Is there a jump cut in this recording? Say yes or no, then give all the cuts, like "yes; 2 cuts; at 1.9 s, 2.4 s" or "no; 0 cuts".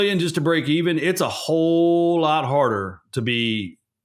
no; 0 cuts